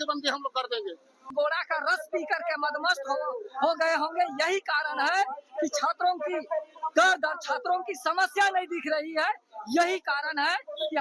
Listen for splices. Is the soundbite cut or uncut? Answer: cut